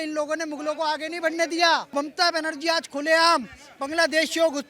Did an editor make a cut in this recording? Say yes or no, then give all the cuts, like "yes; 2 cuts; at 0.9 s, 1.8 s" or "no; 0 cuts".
yes; 1 cut; at 1.9 s